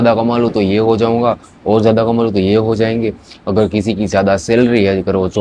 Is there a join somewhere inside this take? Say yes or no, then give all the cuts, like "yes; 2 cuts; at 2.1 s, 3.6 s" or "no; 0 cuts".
no; 0 cuts